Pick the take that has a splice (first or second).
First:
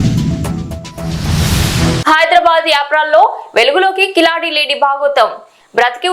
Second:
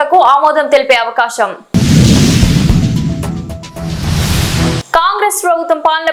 first